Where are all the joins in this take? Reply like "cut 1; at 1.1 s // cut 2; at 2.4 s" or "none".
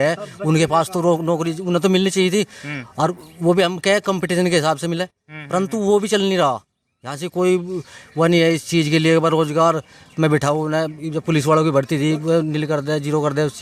none